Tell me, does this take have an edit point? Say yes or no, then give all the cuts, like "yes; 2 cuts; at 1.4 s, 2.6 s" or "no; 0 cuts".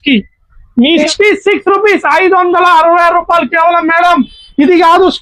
yes; 1 cut; at 1.1 s